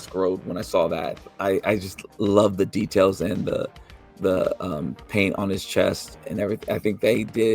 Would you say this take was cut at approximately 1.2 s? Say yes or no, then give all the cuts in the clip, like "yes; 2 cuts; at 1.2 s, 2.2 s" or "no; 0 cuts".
yes; 1 cut; at 1.2 s